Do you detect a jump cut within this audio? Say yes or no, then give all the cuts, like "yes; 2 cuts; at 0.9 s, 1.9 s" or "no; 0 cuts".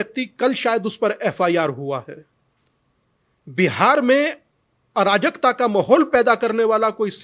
no; 0 cuts